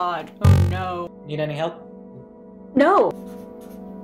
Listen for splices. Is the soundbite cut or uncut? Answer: cut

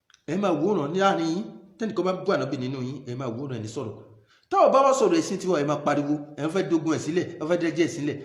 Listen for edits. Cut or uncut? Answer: uncut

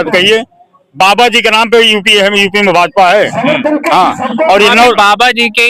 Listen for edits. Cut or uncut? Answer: uncut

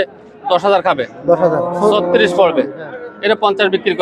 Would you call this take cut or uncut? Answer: uncut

